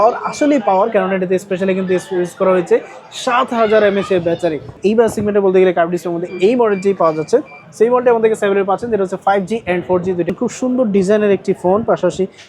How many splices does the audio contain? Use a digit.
2